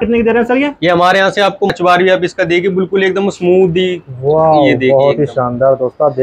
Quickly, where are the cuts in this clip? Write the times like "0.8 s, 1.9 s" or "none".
1.7 s